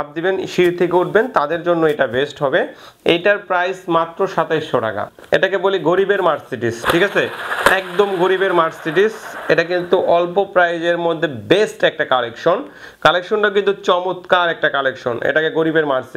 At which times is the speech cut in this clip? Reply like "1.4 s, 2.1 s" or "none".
none